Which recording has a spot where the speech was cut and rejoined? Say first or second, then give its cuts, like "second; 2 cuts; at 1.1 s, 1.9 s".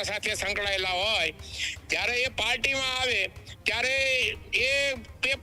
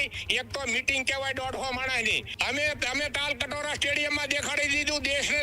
second; 1 cut; at 2.3 s